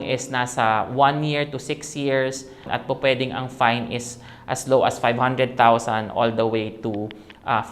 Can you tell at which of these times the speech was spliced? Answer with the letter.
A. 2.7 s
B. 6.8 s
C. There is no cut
A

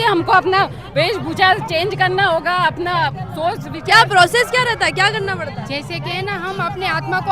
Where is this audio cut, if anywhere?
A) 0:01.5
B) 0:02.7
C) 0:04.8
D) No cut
D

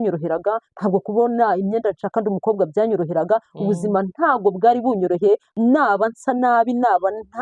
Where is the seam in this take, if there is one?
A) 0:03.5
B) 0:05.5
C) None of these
B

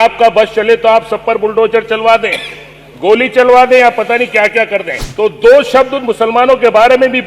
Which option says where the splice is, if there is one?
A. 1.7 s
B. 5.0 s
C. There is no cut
B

